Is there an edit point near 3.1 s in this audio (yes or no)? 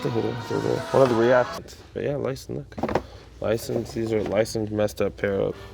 no